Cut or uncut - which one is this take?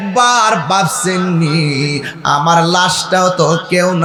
uncut